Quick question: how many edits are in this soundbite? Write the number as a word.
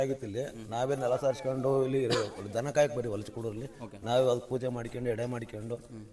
zero